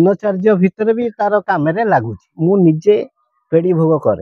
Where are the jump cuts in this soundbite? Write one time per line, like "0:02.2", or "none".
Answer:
0:02.2